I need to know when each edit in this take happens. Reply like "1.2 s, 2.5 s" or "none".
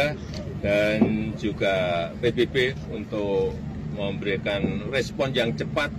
none